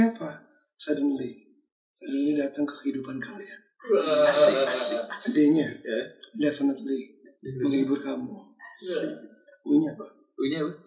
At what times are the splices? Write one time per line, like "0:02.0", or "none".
none